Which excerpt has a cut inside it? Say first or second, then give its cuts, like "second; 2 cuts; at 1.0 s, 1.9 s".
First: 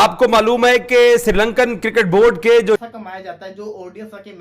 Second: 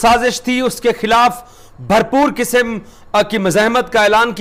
first; 1 cut; at 2.8 s